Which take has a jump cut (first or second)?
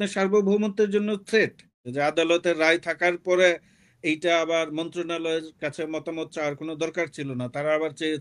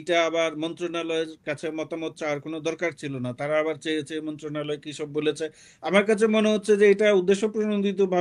first